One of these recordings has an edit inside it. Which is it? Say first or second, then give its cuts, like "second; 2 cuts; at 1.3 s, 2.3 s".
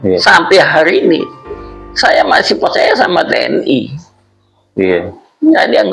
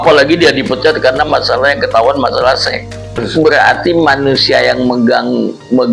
second; 1 cut; at 3.2 s